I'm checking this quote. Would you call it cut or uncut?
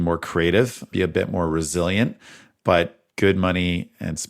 cut